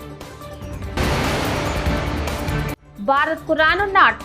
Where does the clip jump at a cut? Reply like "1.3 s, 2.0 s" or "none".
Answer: 1.0 s, 2.8 s